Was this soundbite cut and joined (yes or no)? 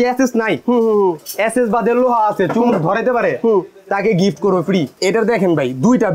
yes